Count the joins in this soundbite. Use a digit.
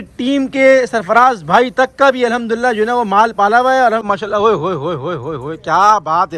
1